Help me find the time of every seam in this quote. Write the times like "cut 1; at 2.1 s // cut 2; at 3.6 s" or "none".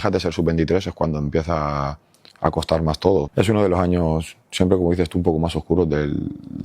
cut 1; at 3.3 s